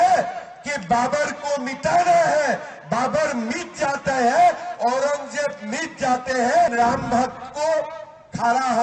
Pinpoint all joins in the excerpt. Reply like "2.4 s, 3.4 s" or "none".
6.7 s